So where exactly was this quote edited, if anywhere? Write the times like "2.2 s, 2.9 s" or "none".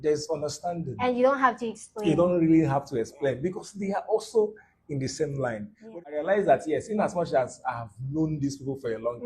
5.8 s